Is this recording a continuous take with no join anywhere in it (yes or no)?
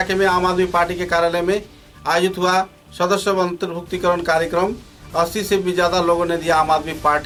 yes